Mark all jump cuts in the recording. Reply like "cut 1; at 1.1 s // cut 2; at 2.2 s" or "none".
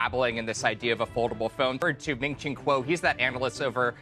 cut 1; at 1.8 s